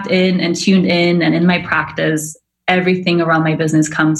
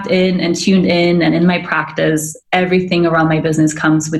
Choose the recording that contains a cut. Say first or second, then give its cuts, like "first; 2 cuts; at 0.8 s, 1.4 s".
second; 1 cut; at 2.4 s